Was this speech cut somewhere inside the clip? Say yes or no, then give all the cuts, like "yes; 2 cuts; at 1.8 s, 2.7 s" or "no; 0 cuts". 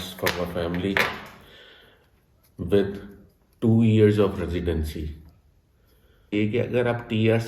yes; 1 cut; at 6.3 s